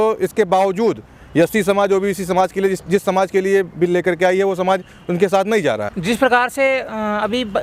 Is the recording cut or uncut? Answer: uncut